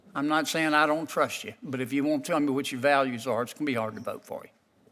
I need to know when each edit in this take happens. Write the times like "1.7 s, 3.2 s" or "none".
none